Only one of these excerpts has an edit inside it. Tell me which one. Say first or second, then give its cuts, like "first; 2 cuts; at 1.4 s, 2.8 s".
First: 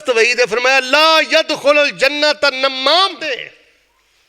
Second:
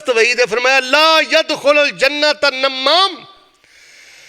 first; 1 cut; at 3.4 s